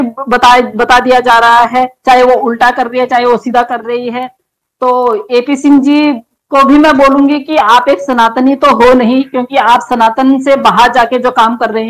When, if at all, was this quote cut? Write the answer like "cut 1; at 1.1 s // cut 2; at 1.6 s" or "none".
none